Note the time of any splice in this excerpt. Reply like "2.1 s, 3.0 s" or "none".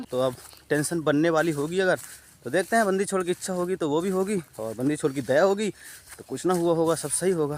none